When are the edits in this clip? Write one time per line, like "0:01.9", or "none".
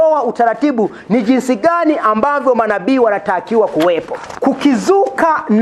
0:04.2